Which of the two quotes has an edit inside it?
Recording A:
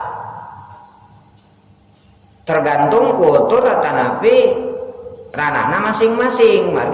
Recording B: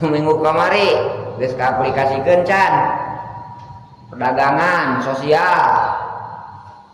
A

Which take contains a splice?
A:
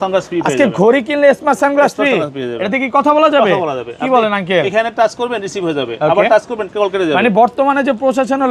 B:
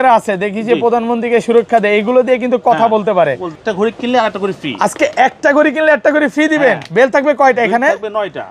B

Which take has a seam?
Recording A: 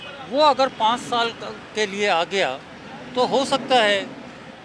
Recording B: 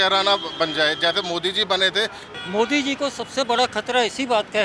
B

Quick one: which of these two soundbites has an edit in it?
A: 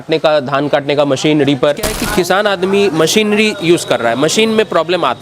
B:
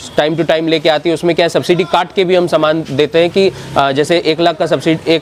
A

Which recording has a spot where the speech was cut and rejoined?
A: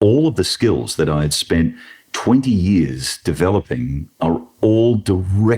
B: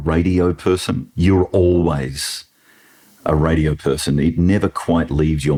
A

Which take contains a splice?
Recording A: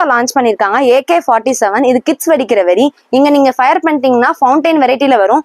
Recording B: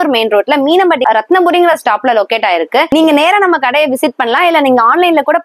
B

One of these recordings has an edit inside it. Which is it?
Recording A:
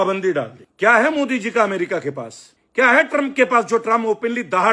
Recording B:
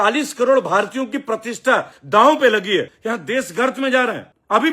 B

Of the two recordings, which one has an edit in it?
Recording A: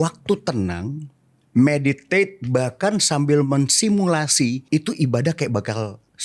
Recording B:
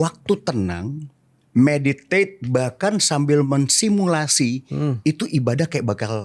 A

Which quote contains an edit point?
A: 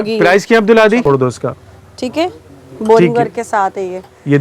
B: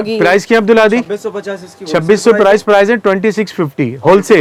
A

